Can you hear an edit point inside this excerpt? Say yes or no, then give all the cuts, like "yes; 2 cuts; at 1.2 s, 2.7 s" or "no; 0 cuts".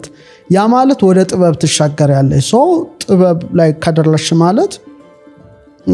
no; 0 cuts